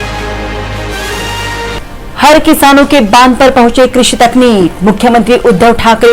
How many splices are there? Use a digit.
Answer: 1